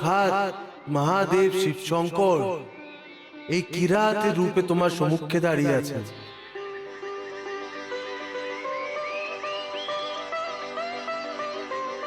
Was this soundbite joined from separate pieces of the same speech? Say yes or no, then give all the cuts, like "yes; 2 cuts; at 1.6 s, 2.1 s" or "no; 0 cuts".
no; 0 cuts